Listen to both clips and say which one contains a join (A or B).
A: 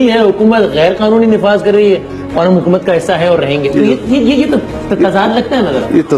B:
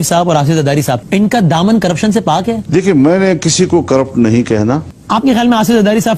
B